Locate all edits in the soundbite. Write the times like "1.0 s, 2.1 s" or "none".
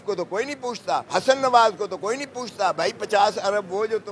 1.1 s